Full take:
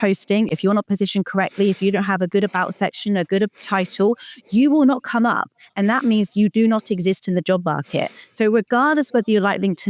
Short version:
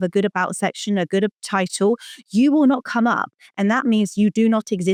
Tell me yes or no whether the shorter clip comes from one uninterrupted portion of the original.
yes